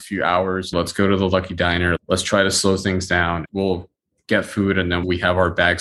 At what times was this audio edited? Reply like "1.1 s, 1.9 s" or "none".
0.7 s, 3.4 s, 5.0 s

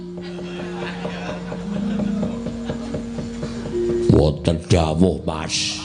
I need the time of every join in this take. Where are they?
none

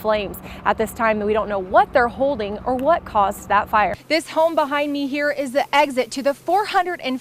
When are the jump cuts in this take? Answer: 4.0 s

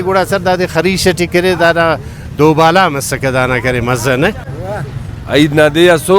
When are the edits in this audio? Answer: 4.5 s

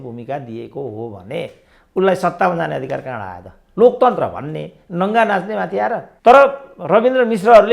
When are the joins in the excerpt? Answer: 6.1 s

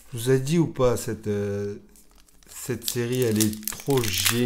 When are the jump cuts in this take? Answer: none

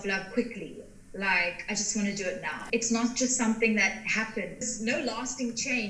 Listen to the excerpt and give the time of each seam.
2.6 s

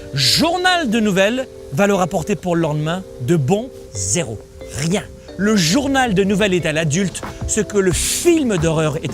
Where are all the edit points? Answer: 1.6 s, 3.7 s, 5.2 s

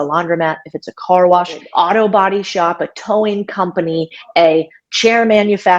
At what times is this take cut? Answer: 1.7 s

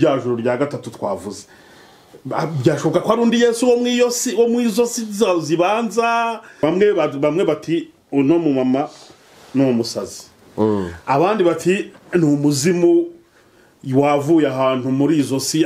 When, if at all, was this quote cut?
6.6 s

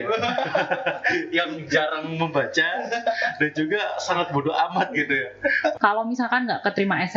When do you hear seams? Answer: 5.8 s

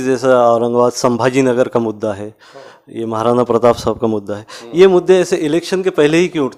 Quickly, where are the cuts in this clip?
none

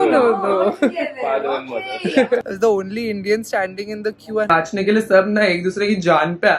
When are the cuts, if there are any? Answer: 2.5 s, 4.5 s

